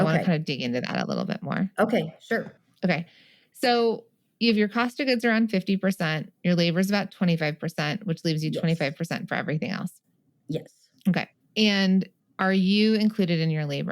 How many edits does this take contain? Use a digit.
3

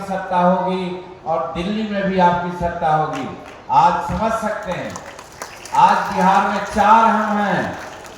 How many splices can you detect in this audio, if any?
0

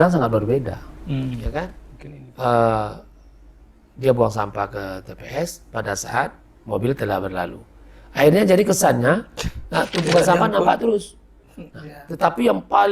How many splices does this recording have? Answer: 1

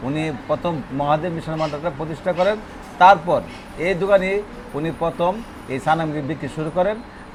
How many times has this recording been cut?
0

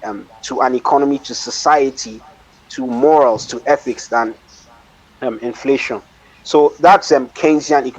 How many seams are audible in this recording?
0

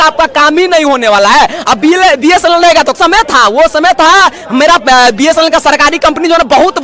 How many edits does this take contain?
1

